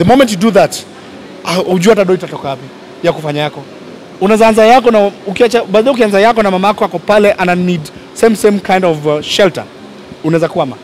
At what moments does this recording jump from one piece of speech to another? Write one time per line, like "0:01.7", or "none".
none